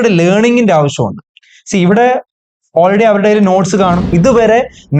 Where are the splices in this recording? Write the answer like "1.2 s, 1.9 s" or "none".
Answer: 4.1 s